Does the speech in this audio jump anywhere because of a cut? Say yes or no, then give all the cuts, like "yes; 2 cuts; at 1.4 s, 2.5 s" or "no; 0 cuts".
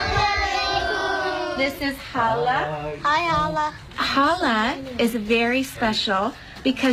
no; 0 cuts